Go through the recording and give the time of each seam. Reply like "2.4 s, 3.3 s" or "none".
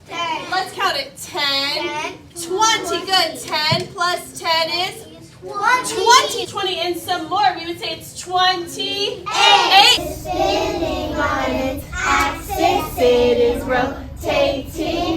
6.5 s, 10.0 s